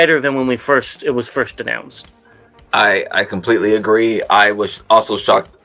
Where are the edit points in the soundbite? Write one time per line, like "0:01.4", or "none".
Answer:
none